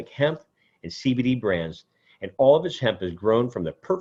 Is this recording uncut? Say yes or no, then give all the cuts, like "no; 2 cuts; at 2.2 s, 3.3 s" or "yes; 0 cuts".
yes; 0 cuts